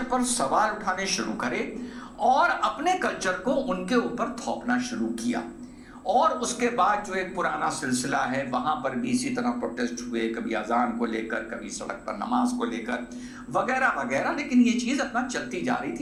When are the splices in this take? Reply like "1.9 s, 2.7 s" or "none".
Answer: none